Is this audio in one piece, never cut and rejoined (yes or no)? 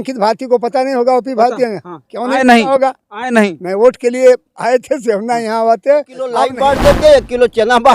no